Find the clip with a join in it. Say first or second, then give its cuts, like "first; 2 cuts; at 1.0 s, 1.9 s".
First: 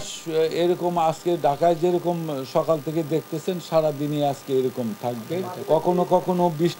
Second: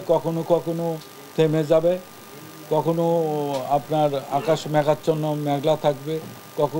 first; 1 cut; at 5.5 s